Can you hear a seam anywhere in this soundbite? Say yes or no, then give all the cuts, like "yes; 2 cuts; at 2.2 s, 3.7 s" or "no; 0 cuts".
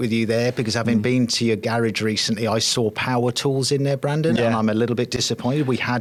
no; 0 cuts